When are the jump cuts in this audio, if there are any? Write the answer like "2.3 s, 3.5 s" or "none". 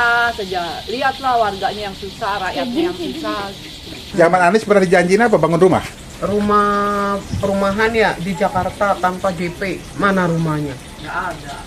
4.0 s